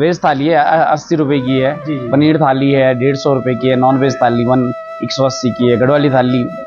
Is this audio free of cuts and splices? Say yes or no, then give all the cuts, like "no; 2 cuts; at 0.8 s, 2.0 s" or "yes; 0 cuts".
yes; 0 cuts